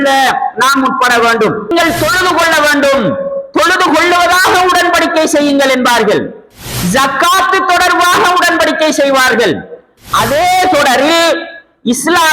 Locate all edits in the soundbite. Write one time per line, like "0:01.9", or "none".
0:01.7